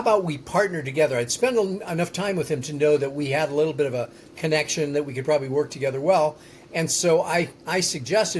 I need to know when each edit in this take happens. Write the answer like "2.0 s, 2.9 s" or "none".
none